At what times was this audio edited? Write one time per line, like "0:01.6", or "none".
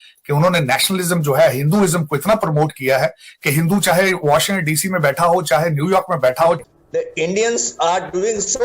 0:06.6